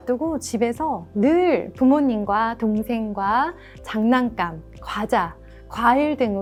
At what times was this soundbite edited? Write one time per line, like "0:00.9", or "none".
none